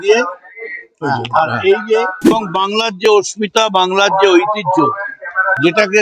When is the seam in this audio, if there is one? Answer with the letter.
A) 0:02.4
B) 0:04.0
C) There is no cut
A